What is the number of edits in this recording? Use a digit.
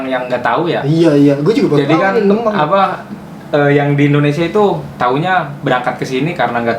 0